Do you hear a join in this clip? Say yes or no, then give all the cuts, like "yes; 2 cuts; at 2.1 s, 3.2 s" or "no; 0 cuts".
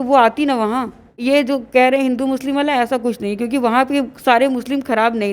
yes; 1 cut; at 1.2 s